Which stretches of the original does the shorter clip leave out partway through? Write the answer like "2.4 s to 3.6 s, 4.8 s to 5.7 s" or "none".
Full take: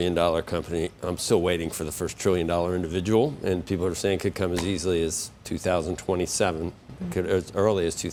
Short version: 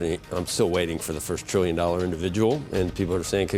none